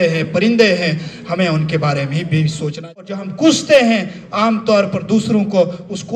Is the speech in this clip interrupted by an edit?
yes; 1 cut; at 2.9 s

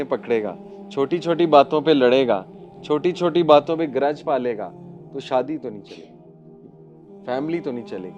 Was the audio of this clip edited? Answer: no; 0 cuts

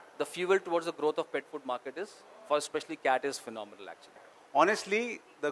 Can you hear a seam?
yes; 1 cut; at 4.3 s

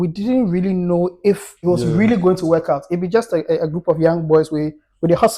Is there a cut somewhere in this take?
yes; 1 cut; at 1.5 s

